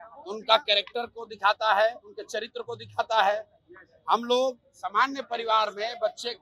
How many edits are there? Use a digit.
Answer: 0